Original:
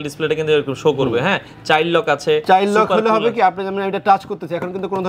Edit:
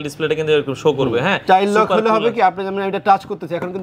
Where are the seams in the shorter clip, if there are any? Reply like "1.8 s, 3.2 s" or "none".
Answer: 1.4 s